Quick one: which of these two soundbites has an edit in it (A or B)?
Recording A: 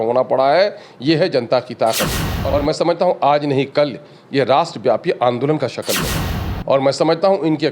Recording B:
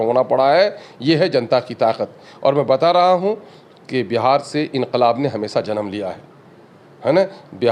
A